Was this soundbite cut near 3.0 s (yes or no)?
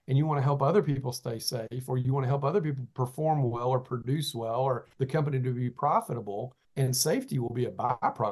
no